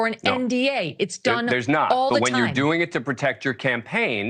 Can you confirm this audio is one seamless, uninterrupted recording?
yes; 0 cuts

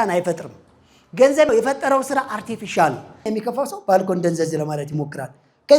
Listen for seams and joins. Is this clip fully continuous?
no; 2 cuts; at 1.5 s, 3.3 s

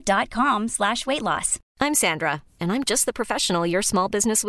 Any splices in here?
yes; 1 cut; at 1.6 s

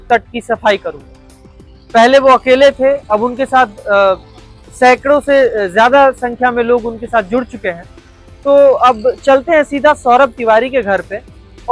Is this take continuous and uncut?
yes; 0 cuts

